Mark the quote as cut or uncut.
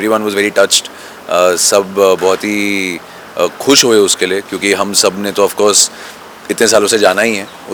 uncut